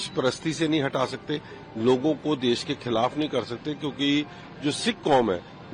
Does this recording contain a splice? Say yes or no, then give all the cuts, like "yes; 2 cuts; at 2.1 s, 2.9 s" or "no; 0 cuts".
no; 0 cuts